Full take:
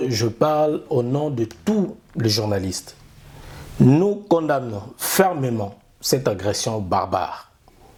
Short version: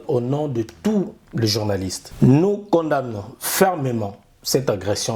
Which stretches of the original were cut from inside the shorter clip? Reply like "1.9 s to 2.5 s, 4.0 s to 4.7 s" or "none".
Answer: 2.8 s to 3.6 s